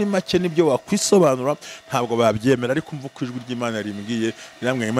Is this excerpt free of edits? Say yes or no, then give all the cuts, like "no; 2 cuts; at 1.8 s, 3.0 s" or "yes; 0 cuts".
yes; 0 cuts